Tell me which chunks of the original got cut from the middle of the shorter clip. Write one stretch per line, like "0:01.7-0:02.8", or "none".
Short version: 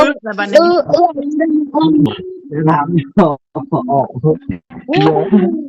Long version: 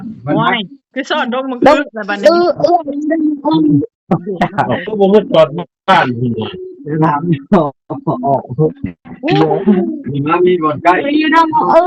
0:03.8-0:06.4